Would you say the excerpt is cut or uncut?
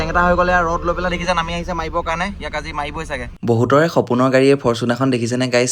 cut